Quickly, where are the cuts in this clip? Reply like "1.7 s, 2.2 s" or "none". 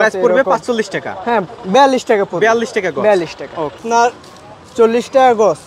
3.8 s